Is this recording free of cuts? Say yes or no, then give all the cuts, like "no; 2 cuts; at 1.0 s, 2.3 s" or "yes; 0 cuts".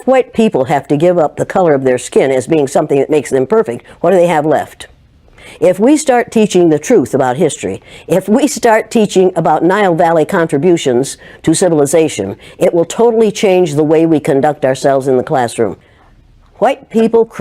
no; 1 cut; at 15.9 s